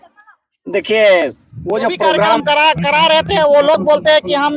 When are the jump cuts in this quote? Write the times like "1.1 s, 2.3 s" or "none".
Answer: 2.4 s